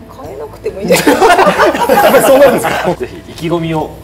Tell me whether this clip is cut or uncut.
cut